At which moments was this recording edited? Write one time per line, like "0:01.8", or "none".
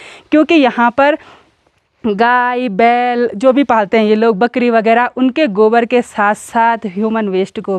none